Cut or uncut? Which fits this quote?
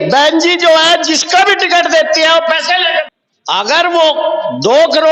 cut